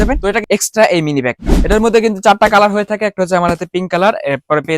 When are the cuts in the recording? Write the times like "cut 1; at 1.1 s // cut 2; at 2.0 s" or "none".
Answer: cut 1; at 1.5 s